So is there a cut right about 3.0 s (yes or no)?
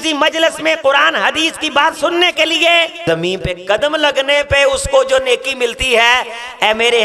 yes